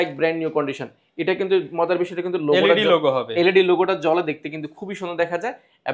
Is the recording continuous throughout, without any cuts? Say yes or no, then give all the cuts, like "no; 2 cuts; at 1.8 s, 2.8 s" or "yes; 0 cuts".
yes; 0 cuts